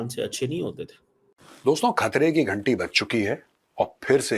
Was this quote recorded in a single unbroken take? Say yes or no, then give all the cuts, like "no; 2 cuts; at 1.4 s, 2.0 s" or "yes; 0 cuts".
no; 1 cut; at 1.4 s